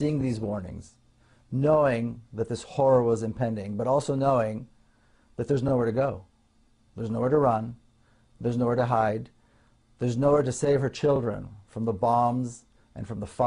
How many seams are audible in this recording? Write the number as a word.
one